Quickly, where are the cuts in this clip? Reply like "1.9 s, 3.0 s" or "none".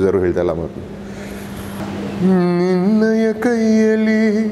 1.8 s